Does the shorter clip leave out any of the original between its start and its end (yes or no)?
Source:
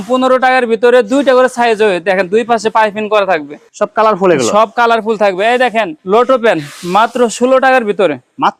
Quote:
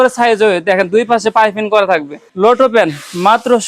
yes